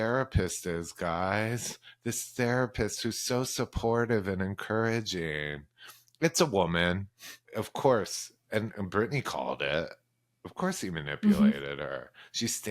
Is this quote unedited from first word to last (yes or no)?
no